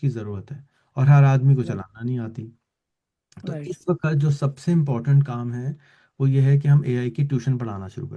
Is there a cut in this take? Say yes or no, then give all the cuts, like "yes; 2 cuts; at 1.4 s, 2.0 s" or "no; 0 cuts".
no; 0 cuts